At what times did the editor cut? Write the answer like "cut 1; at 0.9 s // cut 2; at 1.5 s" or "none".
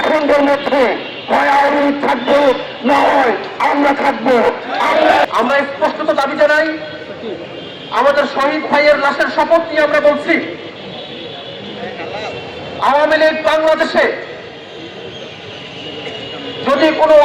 cut 1; at 5.2 s